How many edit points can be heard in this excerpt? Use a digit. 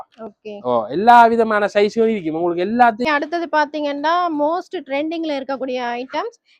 1